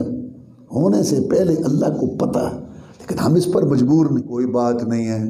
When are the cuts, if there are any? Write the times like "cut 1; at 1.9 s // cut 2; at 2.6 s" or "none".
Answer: cut 1; at 4.3 s